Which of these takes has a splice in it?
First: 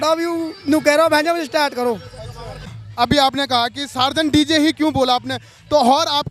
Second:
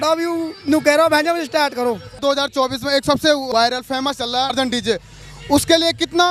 first; 1 cut; at 2.6 s

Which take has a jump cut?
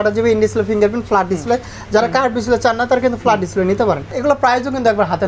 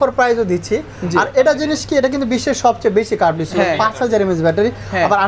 first; 1 cut; at 4.1 s

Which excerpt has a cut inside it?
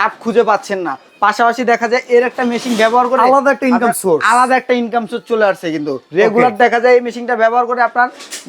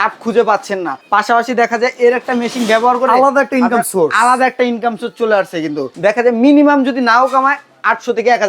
second; 2 cuts; at 1.0 s, 5.9 s

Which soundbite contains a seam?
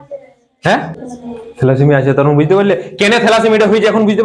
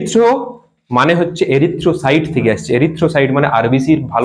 first; 1 cut; at 1.0 s

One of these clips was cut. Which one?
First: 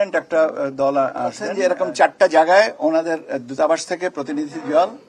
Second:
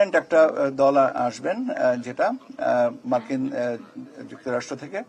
first; 1 cut; at 1.5 s

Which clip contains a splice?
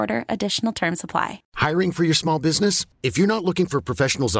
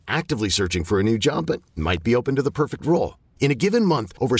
first; 1 cut; at 1.4 s

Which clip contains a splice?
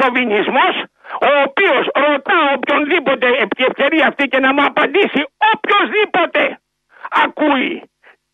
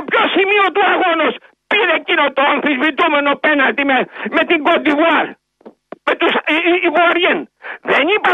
second; 1 cut; at 1.1 s

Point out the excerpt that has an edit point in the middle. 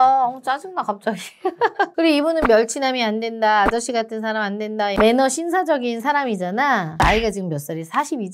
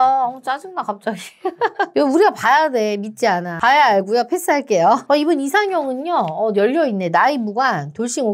first; 2 cuts; at 1.9 s, 7.0 s

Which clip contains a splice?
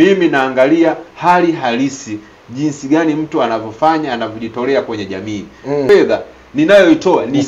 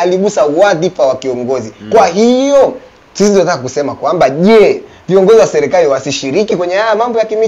first; 1 cut; at 5.9 s

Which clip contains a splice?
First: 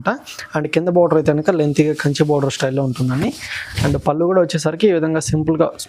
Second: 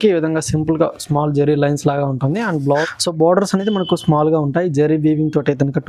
second; 1 cut; at 2.8 s

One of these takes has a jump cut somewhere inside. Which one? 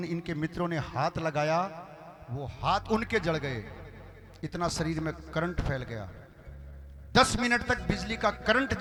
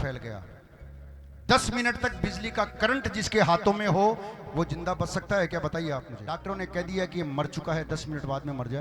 second; 1 cut; at 6.2 s

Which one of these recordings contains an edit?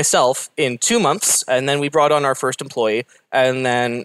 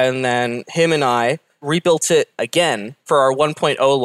second; 2 cuts; at 1.6 s, 3.0 s

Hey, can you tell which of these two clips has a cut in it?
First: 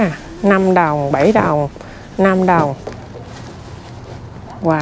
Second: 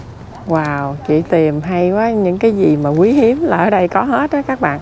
first; 1 cut; at 2.8 s

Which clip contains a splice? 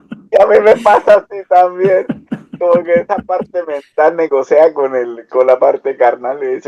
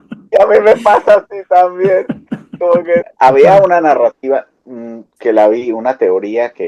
second; 1 cut; at 3.1 s

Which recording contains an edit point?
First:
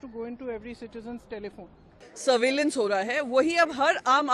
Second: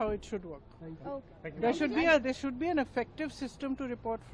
first; 1 cut; at 2.0 s

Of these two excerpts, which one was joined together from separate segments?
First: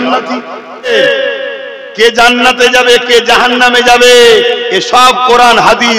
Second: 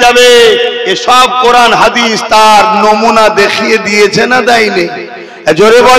first; 1 cut; at 0.9 s

